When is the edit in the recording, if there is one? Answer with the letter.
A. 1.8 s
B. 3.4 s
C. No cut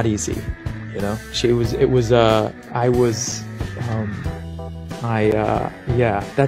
C